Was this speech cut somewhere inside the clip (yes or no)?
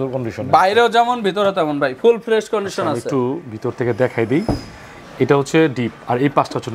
no